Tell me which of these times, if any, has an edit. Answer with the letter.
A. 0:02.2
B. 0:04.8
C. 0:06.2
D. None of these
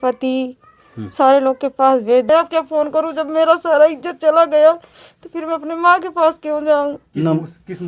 A